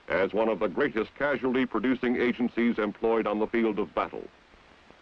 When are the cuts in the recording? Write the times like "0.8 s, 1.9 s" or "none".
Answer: 3.2 s